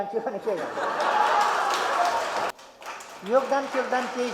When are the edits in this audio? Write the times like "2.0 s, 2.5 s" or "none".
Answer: 2.5 s